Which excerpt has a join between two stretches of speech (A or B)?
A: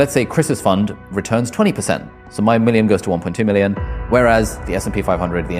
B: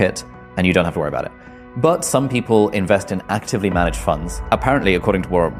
B